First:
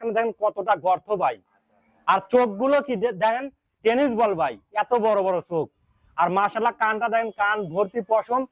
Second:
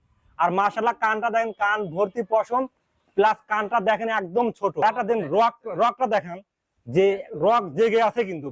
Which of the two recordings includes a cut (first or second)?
second